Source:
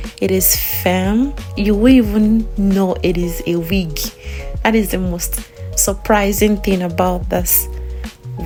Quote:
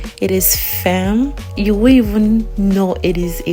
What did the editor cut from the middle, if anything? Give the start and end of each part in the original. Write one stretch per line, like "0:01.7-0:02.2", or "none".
none